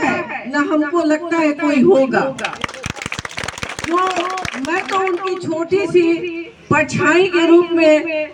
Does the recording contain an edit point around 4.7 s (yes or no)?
no